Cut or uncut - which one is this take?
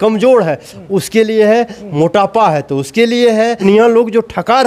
cut